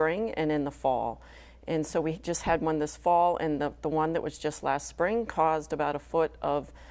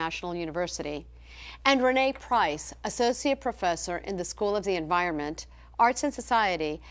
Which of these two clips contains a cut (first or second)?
second